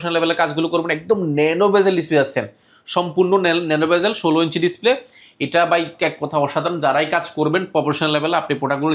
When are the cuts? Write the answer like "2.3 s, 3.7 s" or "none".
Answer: none

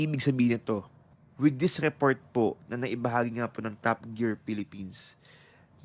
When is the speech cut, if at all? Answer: 1.0 s

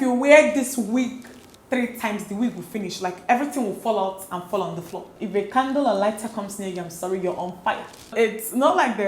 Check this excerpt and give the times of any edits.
5.2 s, 8.0 s

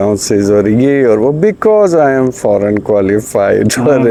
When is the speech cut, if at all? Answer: none

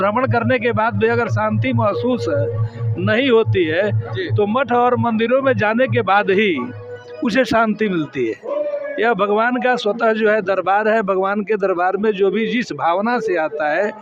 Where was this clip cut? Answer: none

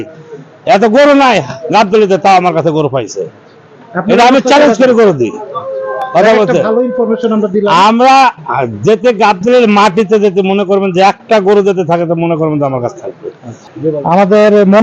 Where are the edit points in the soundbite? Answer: none

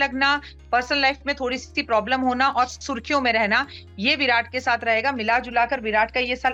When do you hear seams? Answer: none

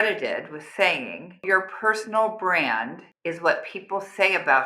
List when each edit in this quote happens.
1.4 s

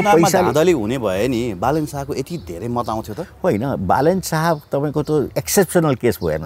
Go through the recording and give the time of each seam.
none

